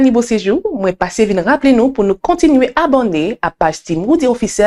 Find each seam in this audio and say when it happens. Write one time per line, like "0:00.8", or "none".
none

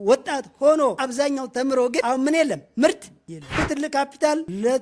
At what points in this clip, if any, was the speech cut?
0:01.0
0:02.0
0:03.6

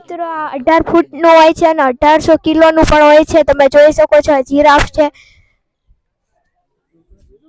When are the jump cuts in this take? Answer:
none

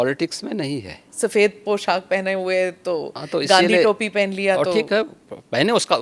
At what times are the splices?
0:01.1

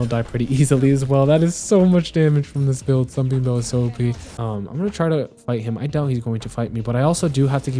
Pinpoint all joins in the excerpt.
0:04.3

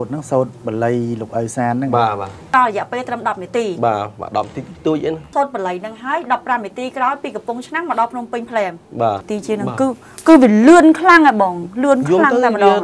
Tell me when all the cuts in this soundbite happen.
0:02.5
0:05.3
0:09.3

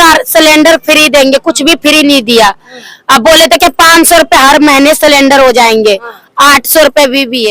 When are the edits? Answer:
none

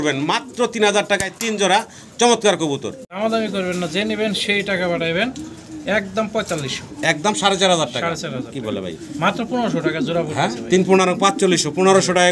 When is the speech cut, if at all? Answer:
0:03.2

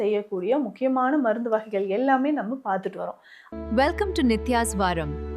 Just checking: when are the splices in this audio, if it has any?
0:03.3

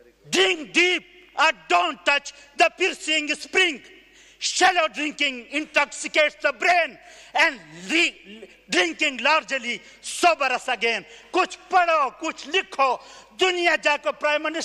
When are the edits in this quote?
none

